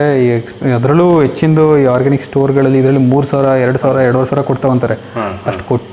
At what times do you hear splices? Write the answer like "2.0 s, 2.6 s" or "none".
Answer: none